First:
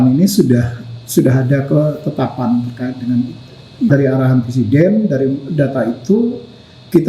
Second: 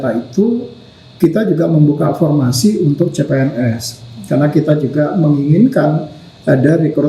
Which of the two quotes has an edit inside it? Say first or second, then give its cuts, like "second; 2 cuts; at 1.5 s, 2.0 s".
first; 1 cut; at 3.9 s